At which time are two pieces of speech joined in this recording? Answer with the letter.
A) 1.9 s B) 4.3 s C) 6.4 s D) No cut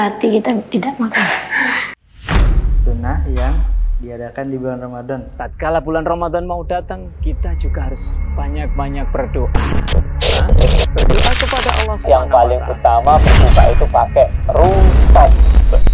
A